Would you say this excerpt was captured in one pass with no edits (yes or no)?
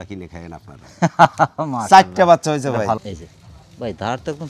no